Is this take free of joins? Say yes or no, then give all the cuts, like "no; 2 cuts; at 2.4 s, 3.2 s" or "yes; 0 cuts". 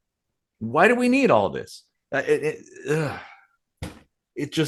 yes; 0 cuts